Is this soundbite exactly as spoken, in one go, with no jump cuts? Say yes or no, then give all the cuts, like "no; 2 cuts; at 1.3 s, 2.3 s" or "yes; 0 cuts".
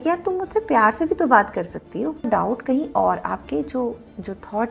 no; 1 cut; at 2.2 s